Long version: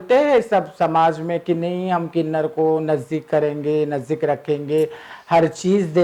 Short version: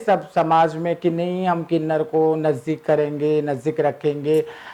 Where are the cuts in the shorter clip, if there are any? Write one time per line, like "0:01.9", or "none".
none